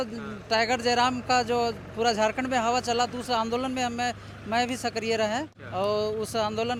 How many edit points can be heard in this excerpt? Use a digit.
0